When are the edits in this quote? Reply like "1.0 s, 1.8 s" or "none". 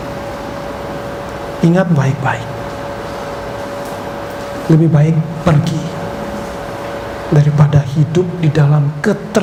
none